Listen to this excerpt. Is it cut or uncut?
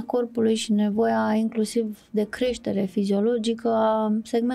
uncut